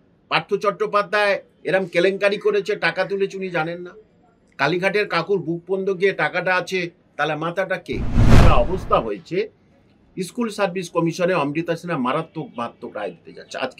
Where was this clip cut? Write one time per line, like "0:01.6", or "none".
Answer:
0:08.4